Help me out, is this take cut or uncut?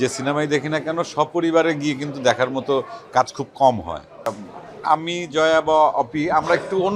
cut